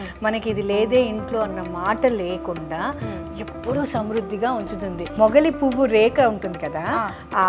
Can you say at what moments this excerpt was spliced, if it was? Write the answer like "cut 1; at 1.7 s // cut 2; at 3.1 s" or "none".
cut 1; at 5.1 s